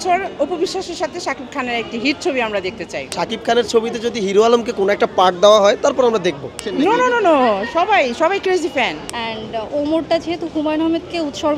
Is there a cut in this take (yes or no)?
yes